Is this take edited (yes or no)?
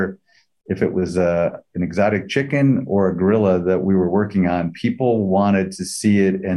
no